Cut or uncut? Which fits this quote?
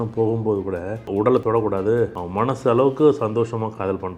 cut